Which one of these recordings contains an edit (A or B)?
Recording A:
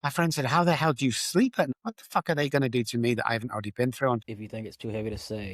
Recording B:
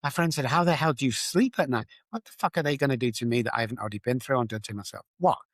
A